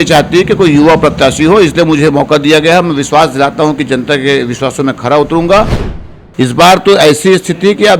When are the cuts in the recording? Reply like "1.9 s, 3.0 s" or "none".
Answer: 6.0 s